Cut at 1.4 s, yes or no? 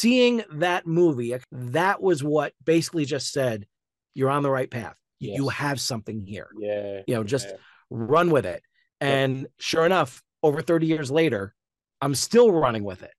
yes